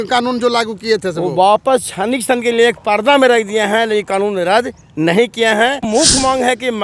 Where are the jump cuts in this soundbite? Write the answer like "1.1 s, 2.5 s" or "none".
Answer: 5.8 s

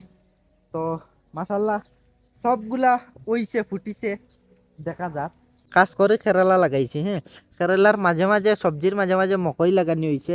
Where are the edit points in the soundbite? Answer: 5.6 s

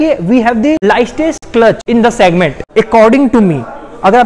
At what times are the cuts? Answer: 0.8 s, 1.8 s, 2.6 s

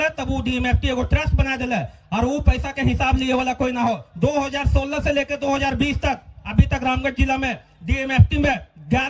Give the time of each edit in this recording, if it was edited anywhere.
none

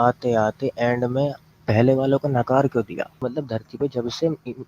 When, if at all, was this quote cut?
3.2 s

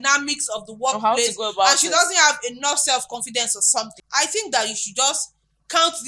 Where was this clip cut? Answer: 4.0 s

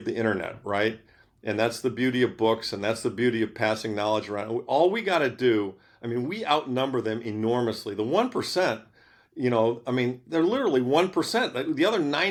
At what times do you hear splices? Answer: none

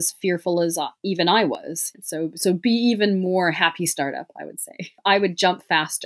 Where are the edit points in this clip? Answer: 1.8 s, 5.0 s

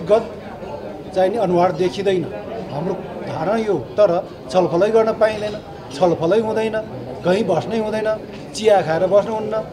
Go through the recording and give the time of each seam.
none

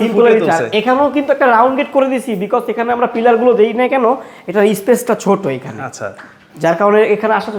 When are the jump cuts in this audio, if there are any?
none

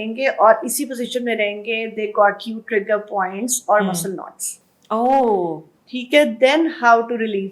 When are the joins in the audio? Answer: none

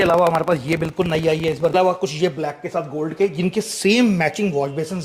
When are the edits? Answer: 1.7 s

